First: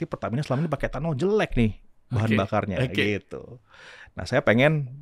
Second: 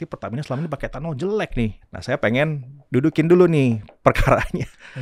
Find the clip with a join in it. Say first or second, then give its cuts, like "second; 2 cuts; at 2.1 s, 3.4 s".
second; 1 cut; at 1.9 s